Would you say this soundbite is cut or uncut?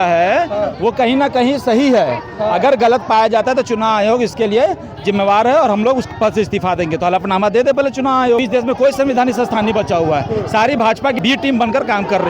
cut